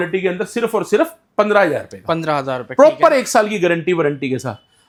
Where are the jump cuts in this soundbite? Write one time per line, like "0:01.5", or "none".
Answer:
none